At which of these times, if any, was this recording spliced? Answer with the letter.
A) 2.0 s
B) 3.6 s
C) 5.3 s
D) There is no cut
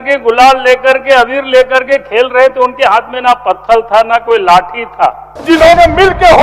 C